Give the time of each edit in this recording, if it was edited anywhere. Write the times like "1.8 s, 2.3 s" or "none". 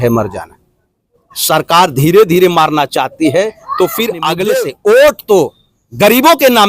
4.4 s